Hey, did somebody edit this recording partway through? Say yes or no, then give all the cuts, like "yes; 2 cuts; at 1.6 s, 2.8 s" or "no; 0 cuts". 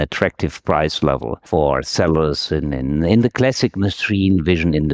no; 0 cuts